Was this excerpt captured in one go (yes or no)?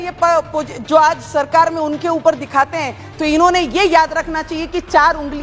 yes